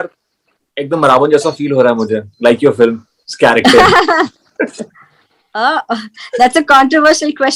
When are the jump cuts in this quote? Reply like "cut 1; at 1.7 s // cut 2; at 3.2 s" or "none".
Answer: none